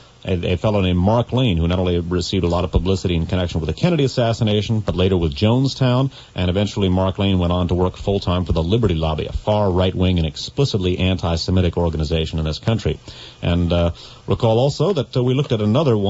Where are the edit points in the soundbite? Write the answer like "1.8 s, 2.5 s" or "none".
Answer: 1.3 s